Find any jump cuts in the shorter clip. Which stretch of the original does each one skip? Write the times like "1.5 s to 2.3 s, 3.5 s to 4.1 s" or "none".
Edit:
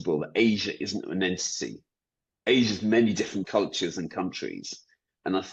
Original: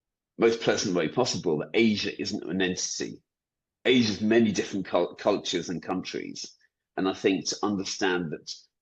4.8 s to 5.2 s

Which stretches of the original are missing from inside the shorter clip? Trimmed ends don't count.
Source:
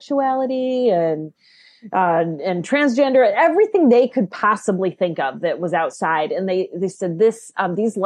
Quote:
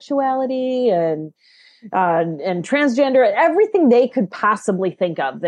none

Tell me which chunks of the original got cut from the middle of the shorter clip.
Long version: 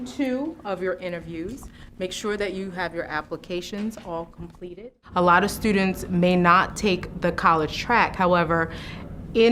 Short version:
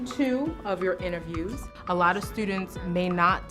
1.7 s to 4.9 s

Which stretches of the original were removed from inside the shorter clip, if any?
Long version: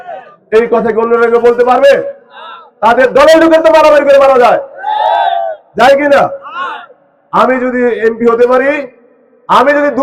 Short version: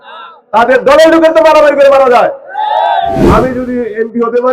5.5 s to 7.3 s

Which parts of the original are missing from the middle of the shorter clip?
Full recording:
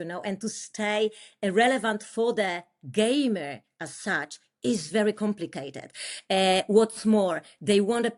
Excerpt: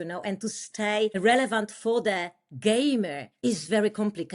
1.2 s to 1.5 s, 3.6 s to 4.5 s

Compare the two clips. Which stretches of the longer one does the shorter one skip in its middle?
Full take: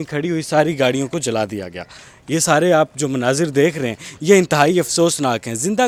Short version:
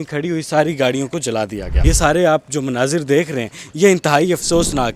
1.7 s to 2.1 s

